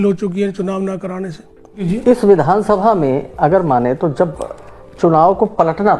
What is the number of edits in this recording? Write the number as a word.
one